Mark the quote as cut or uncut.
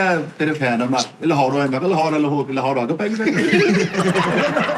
uncut